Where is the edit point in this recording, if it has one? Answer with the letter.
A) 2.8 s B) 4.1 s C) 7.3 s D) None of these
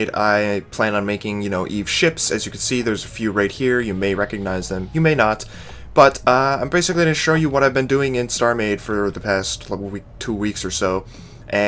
B